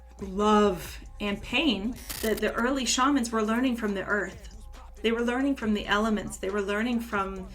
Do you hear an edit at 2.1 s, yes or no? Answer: yes